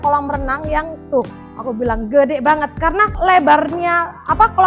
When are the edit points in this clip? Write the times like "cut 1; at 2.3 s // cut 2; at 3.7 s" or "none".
cut 1; at 3.1 s